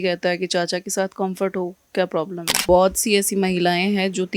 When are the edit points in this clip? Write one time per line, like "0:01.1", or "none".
0:02.6